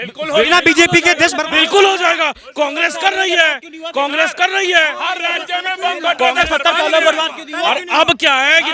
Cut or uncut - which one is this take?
uncut